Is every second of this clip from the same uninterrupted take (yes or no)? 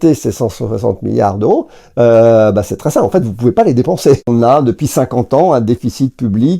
no